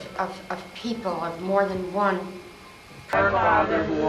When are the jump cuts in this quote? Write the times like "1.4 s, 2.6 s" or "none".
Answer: 3.1 s